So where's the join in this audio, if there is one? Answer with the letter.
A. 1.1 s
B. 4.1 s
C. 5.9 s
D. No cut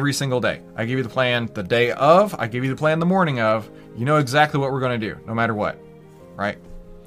D